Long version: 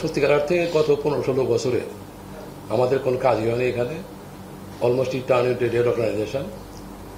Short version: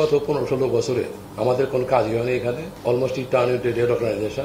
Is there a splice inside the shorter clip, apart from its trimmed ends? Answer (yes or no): yes